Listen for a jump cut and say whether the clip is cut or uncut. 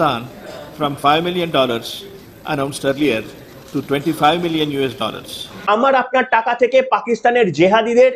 cut